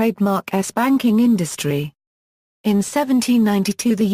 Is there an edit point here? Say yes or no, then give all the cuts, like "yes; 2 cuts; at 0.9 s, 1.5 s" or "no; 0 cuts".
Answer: no; 0 cuts